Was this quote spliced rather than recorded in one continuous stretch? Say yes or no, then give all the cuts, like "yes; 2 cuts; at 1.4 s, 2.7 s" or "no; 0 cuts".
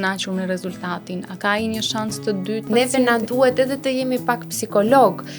yes; 1 cut; at 2.7 s